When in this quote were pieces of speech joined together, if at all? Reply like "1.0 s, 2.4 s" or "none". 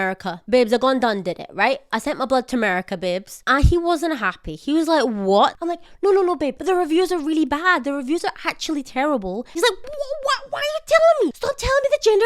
5.6 s, 6.6 s, 9.6 s, 11.4 s